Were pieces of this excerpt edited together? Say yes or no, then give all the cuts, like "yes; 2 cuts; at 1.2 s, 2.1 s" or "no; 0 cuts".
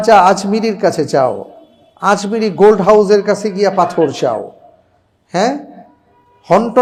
no; 0 cuts